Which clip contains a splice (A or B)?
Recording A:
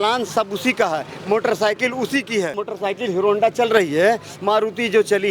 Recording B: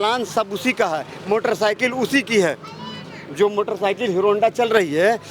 A